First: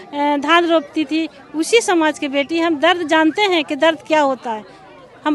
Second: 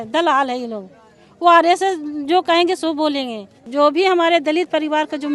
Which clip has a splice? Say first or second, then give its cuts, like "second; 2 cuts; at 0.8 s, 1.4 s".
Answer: second; 1 cut; at 3.6 s